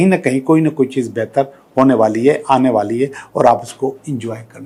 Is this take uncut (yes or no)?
yes